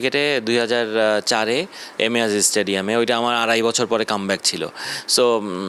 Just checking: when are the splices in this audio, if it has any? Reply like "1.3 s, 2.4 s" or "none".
none